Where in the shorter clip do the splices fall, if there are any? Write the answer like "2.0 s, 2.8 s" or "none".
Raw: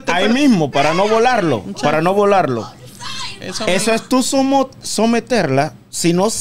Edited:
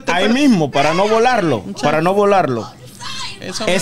none

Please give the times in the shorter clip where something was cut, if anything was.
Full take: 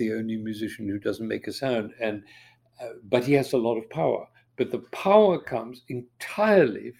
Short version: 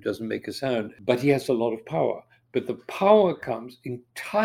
0.9 s

